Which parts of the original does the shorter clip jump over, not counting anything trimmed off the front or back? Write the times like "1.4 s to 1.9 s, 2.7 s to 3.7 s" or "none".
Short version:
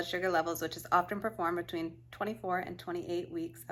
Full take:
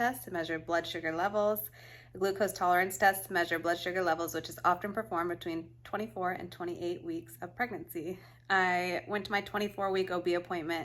none